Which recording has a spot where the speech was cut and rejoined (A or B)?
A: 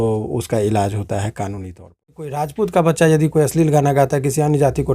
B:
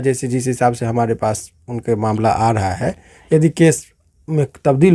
A